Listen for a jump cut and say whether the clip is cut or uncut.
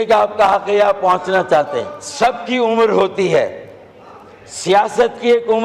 cut